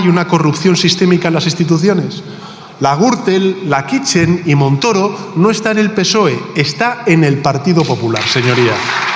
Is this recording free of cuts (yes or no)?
yes